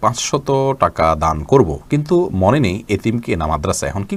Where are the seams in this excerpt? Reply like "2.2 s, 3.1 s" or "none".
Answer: none